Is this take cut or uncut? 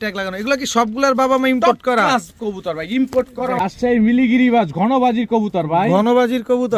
cut